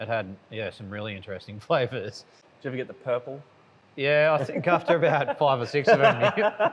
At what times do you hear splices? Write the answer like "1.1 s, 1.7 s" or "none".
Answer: 2.4 s